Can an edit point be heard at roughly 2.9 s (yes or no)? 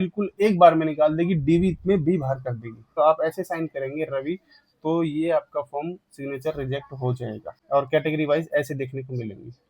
yes